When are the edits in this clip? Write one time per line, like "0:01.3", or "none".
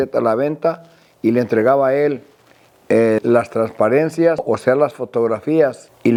none

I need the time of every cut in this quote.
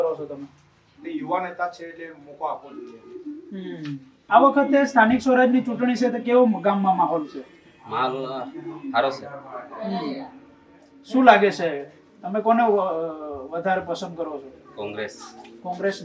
0:04.1

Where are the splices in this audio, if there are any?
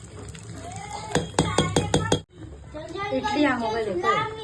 0:02.2

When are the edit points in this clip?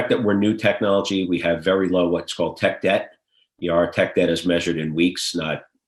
none

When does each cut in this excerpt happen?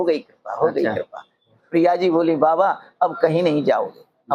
0:01.5

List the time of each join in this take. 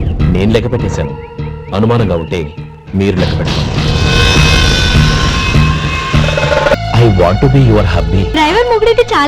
0:06.8
0:08.3

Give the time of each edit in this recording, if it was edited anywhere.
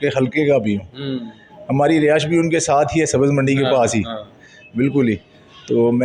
none

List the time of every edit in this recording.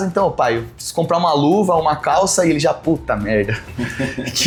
none

